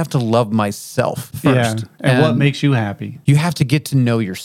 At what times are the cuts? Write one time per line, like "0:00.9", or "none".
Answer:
0:01.3
0:03.1

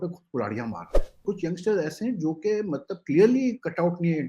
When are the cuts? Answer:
0:01.2

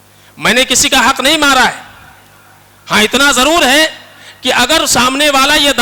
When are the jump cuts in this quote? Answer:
none

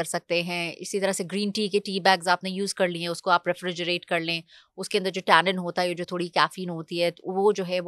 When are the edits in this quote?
none

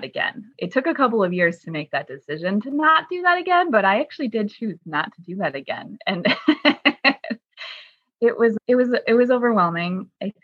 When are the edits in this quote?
none

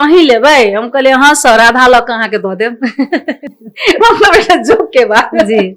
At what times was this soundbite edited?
none

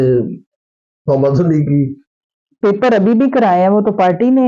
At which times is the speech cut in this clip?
none

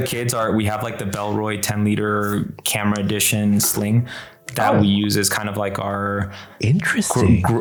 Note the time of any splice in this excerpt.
none

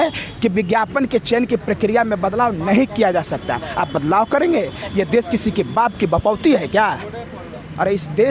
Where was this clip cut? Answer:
none

